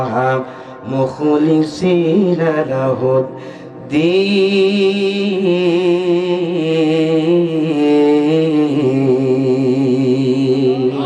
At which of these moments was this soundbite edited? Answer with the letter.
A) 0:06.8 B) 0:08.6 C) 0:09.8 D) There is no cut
D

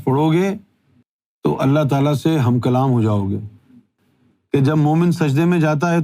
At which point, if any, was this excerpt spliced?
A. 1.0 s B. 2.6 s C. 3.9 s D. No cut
C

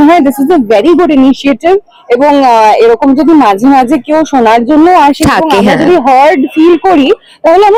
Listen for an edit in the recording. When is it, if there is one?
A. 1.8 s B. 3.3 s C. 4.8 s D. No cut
D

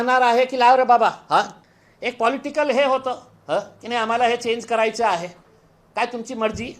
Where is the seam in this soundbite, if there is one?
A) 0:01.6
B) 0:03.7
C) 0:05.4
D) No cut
A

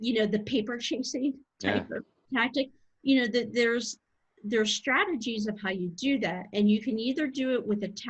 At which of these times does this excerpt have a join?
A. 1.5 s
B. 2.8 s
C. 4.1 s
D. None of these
D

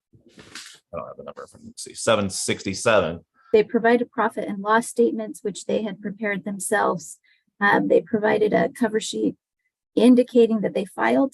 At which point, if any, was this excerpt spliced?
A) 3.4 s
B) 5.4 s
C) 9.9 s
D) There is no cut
A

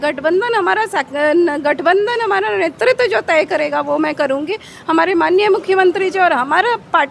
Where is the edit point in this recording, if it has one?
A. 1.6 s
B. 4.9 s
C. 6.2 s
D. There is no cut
D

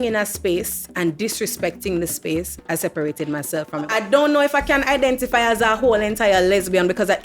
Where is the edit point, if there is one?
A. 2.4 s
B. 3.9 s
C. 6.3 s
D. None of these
B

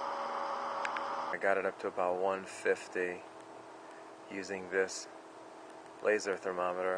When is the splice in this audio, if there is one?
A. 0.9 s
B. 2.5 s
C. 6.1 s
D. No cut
B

